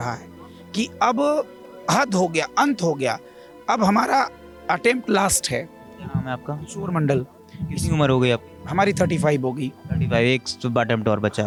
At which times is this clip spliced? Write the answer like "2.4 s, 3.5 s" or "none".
none